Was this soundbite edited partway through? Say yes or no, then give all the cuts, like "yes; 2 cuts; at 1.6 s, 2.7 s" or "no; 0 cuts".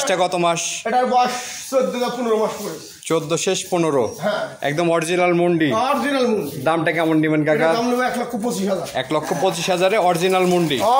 no; 0 cuts